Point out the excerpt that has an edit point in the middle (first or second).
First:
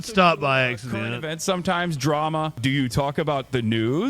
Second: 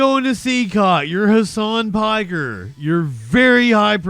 first